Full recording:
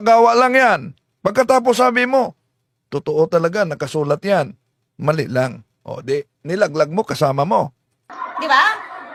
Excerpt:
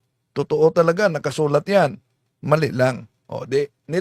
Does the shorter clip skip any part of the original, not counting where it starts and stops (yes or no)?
no